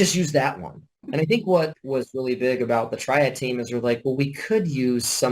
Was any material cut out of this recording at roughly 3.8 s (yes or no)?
no